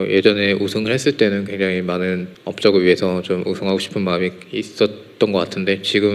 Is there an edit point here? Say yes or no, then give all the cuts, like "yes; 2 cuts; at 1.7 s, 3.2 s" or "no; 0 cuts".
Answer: yes; 1 cut; at 2.3 s